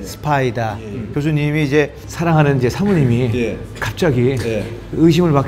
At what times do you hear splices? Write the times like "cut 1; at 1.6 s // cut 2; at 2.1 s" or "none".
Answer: cut 1; at 1.1 s